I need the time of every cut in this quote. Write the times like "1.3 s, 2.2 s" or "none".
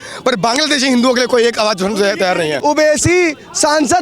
2.6 s